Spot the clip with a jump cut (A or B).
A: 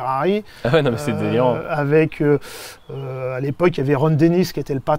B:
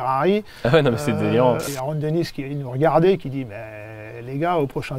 B